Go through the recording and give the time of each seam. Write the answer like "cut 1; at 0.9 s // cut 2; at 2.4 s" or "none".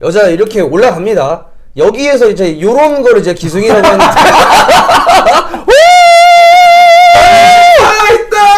none